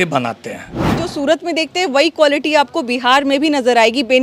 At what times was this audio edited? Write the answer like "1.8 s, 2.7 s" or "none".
1.0 s